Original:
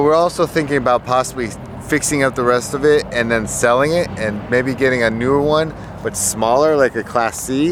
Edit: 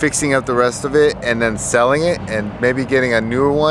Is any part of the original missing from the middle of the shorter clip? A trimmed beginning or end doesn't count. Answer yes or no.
no